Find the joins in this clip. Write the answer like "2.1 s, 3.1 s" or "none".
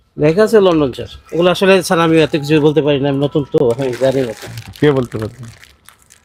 none